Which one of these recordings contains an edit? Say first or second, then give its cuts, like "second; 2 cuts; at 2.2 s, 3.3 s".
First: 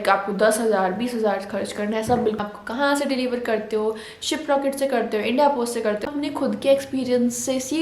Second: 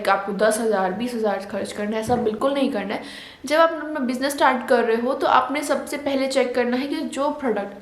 first; 2 cuts; at 2.4 s, 6.1 s